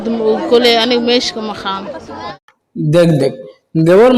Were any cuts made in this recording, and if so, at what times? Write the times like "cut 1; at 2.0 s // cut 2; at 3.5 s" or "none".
cut 1; at 2.2 s